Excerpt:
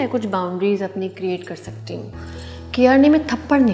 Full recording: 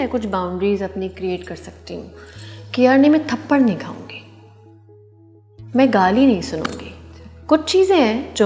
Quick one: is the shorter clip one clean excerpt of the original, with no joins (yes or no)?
yes